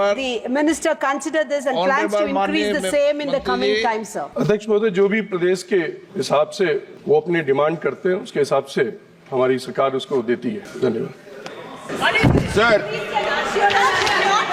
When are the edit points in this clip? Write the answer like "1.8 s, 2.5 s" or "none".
4.2 s, 6.0 s, 6.9 s, 10.7 s, 11.9 s